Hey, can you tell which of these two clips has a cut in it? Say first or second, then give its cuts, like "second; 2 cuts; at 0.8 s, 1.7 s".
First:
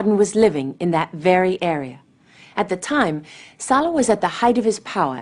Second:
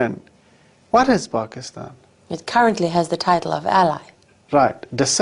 second; 1 cut; at 2.8 s